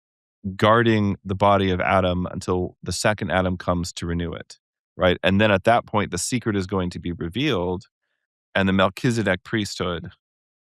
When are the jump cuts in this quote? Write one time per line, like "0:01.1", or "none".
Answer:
none